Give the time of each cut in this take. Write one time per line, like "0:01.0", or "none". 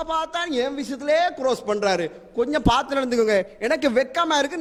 none

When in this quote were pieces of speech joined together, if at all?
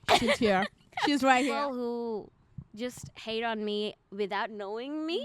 0:01.5

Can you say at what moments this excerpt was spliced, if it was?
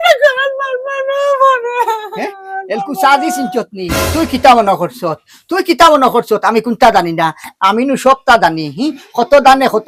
none

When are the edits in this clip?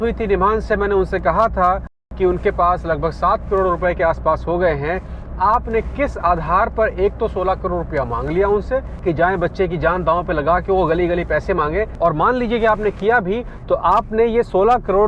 0:02.1

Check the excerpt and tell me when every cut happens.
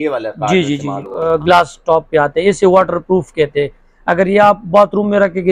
0:01.2

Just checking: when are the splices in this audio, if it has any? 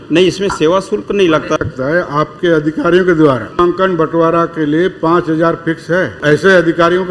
0:01.6
0:03.5
0:06.2

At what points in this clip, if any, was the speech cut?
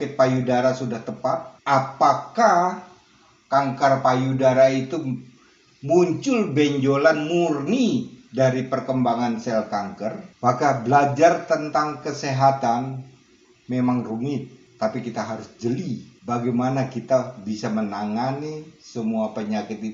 0:01.5
0:10.3

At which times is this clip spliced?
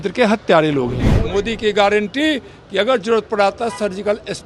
0:01.2

